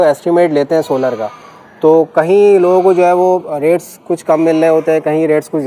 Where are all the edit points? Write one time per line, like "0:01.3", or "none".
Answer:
none